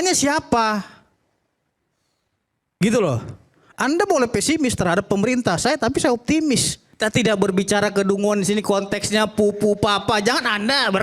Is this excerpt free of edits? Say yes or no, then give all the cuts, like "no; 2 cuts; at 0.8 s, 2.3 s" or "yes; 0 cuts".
no; 1 cut; at 6.8 s